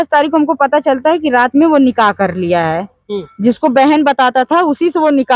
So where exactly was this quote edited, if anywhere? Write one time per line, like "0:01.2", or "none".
none